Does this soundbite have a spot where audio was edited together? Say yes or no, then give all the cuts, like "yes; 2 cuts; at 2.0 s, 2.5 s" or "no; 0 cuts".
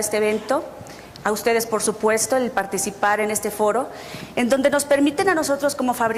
no; 0 cuts